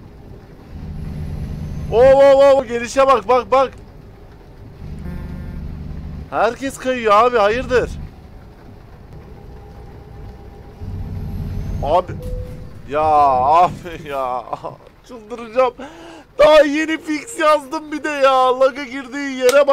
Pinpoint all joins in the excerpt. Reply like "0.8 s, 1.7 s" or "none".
2.6 s, 9.1 s